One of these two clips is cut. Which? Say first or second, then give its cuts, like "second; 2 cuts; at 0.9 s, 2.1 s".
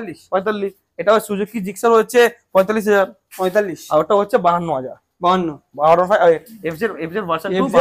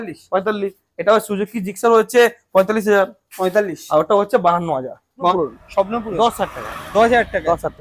second; 1 cut; at 5.3 s